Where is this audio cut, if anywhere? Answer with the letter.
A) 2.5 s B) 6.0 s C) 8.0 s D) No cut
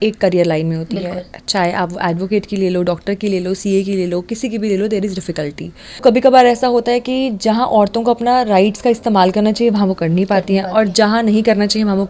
B